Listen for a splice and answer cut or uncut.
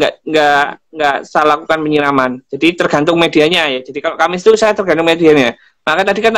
uncut